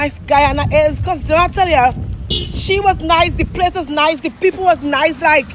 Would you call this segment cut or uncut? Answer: uncut